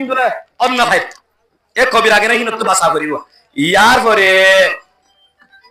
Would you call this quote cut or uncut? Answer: uncut